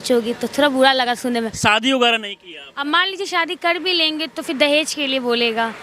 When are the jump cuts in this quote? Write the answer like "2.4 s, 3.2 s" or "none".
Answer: 1.5 s, 2.7 s